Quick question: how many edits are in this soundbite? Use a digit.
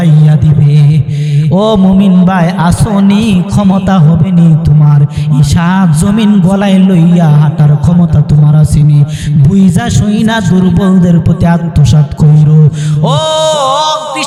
0